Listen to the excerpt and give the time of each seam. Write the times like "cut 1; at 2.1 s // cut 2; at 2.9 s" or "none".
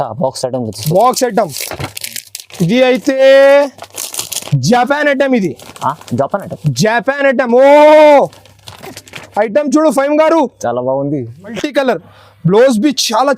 cut 1; at 11.4 s